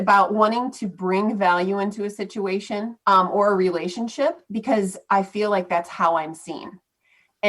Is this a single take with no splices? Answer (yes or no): no